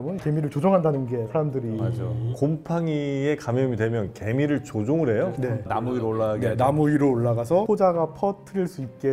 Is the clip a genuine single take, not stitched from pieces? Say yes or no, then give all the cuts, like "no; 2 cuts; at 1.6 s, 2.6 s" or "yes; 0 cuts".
no; 1 cut; at 2.3 s